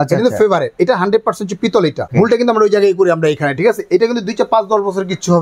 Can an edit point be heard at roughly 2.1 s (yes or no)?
yes